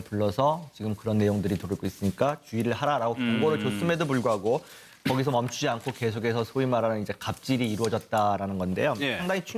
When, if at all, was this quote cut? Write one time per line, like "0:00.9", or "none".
none